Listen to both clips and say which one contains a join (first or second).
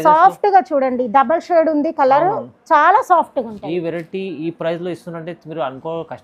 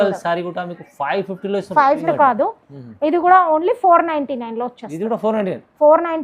second